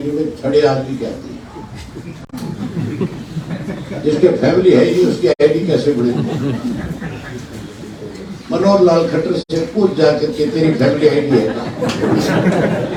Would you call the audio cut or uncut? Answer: uncut